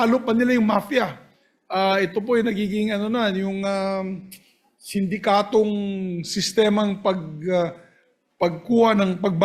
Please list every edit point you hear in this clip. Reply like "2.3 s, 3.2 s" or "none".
none